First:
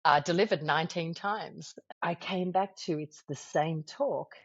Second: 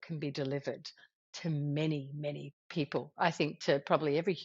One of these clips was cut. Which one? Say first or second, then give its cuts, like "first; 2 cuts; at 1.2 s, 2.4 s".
first; 1 cut; at 1.8 s